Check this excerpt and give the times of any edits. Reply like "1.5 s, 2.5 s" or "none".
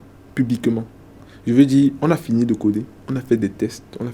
none

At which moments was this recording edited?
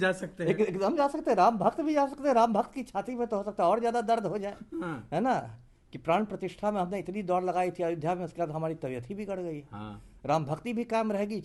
none

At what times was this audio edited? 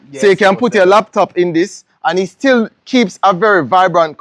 none

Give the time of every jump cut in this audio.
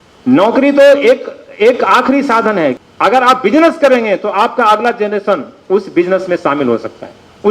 2.8 s

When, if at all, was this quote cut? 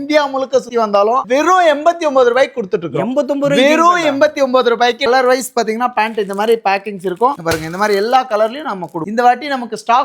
1.2 s, 5.1 s, 9.0 s

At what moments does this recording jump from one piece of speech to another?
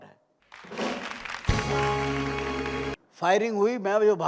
3.0 s

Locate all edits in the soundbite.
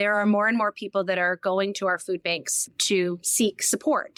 none

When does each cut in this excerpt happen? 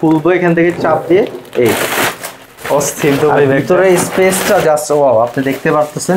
none

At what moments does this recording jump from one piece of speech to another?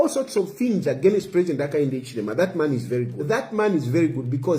3.5 s

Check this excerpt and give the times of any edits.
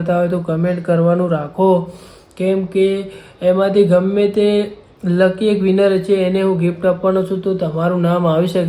none

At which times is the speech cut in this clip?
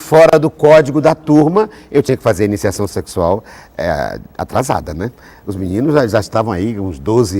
none

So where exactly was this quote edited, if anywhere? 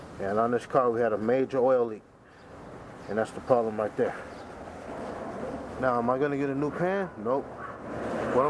4.9 s

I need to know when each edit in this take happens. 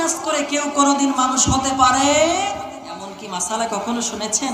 3.1 s

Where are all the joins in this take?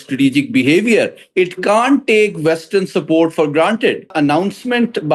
4.1 s

